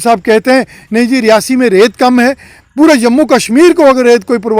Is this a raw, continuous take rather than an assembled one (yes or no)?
yes